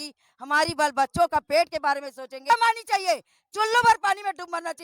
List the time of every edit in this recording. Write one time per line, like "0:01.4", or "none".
0:02.5